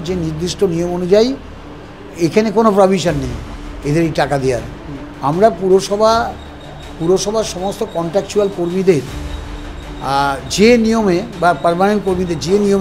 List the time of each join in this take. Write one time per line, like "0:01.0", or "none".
none